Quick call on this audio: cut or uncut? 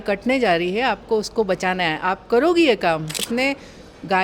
cut